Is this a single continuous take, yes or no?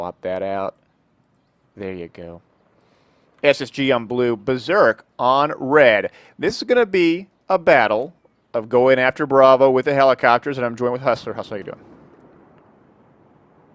no